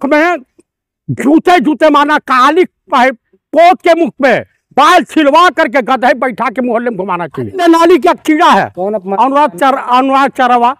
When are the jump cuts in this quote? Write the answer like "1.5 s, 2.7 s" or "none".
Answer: 7.6 s